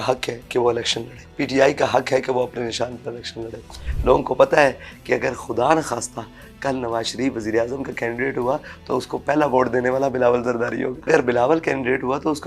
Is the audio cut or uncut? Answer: cut